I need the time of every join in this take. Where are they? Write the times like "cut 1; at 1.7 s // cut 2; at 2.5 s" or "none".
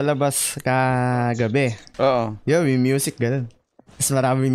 cut 1; at 2.4 s

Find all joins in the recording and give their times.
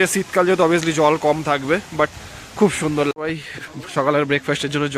cut 1; at 3.1 s

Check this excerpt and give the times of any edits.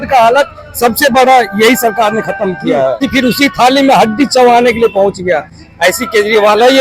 cut 1; at 3.1 s

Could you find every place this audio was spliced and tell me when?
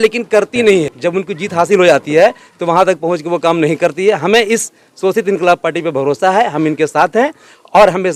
none

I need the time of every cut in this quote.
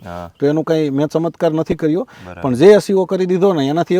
none

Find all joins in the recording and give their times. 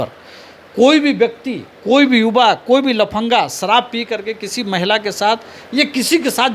none

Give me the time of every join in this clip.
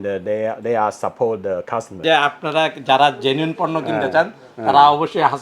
cut 1; at 2.0 s

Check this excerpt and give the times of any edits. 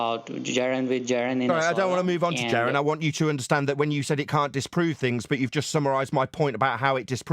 none

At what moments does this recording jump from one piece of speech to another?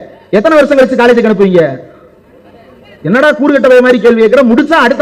none

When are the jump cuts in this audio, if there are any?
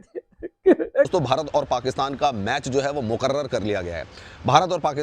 cut 1; at 1.1 s

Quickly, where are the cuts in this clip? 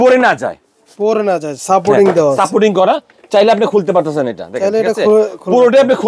none

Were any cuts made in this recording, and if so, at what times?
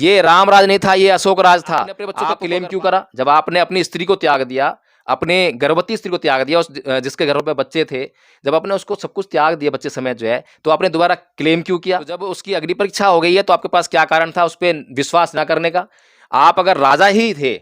cut 1; at 2.1 s // cut 2; at 12.4 s

